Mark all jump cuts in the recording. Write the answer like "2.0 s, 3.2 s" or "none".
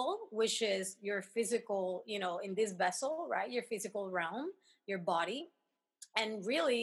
none